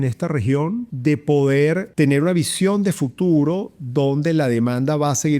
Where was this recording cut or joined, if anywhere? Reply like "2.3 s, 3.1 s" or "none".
0.9 s, 1.9 s

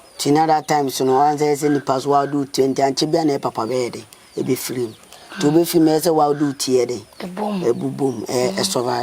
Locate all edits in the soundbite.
none

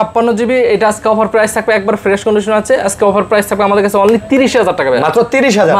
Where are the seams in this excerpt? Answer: none

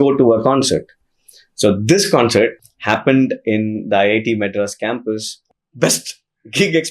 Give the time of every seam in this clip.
5.5 s

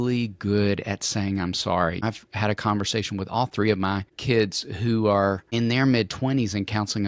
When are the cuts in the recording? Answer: 2.0 s, 4.1 s, 5.5 s

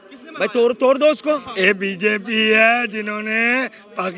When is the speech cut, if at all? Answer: 1.5 s

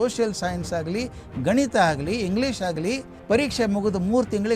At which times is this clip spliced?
3.1 s

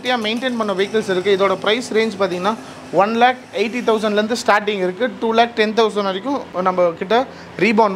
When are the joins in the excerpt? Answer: none

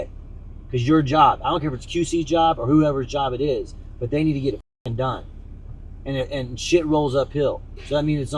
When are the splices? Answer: none

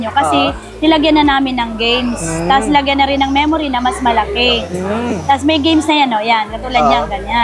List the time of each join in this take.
none

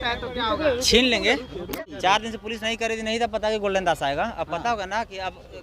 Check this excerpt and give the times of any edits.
1.8 s

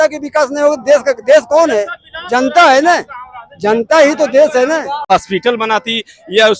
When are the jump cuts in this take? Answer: 5.1 s

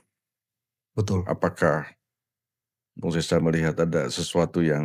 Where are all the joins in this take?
none

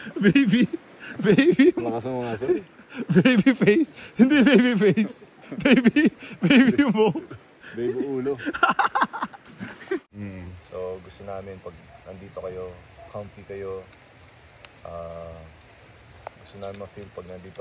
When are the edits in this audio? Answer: 10.1 s

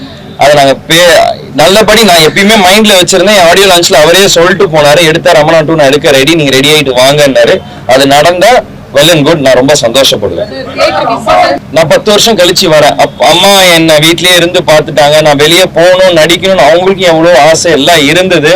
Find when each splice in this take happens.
11.6 s

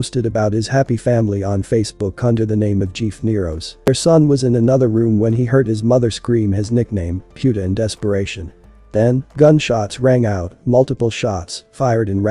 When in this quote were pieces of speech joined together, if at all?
3.9 s

